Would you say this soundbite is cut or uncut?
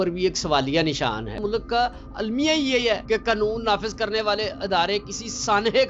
cut